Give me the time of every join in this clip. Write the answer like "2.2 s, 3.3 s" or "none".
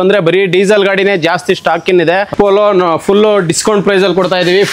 2.3 s